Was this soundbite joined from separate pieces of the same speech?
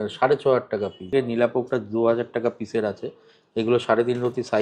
yes; 1 cut; at 1.0 s

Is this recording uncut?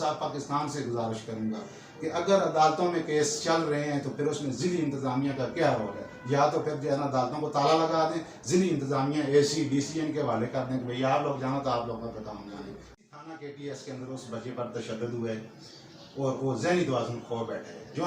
no; 1 cut; at 13.1 s

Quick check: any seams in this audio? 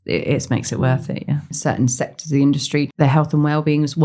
yes; 2 cuts; at 1.5 s, 2.9 s

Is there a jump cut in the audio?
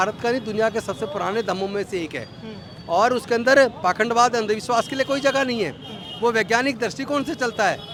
no; 0 cuts

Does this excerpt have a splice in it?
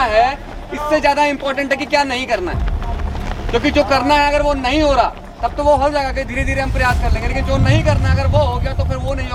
no; 0 cuts

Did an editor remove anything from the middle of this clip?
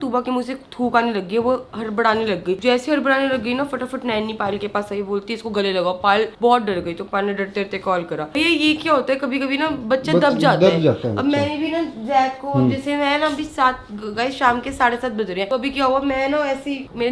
no; 0 cuts

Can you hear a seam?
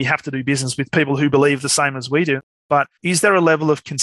yes; 1 cut; at 2.6 s

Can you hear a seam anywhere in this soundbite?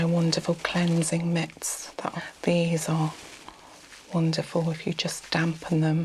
yes; 1 cut; at 2.1 s

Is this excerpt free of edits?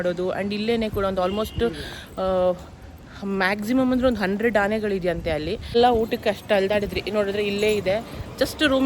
no; 1 cut; at 5.8 s

